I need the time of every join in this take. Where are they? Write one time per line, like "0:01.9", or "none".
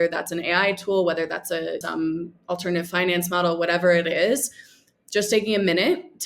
0:01.8